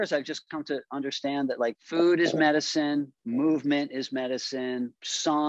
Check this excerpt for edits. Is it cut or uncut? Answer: uncut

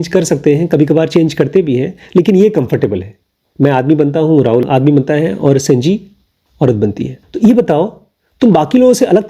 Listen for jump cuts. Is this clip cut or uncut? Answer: cut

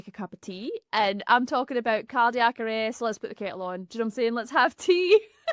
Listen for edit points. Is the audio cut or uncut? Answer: uncut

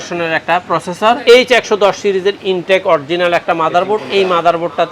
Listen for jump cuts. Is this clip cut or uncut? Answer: cut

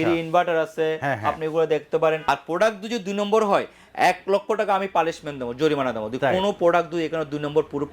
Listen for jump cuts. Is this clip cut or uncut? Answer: cut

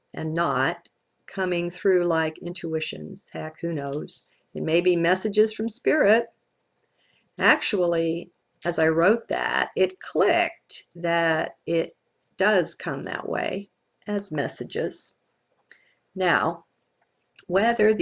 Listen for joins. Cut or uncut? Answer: uncut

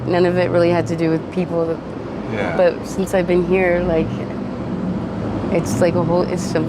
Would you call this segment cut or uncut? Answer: uncut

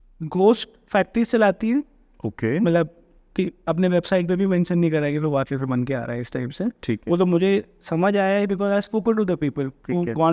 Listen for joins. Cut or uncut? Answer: uncut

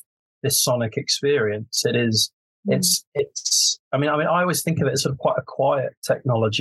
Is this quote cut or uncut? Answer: uncut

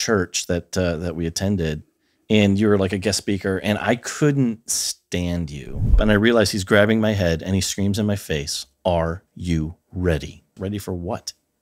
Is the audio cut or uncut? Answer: cut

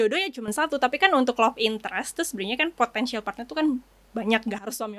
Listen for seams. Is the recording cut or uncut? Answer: uncut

